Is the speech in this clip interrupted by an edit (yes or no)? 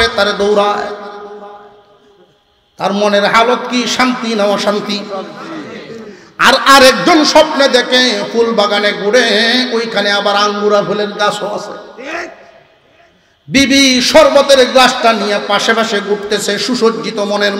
no